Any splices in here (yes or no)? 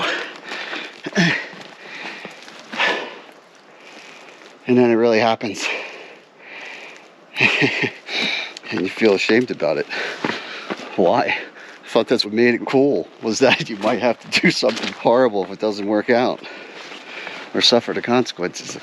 yes